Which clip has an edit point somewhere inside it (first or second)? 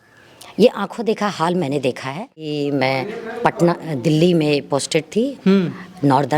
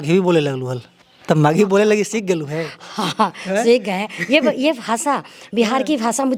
first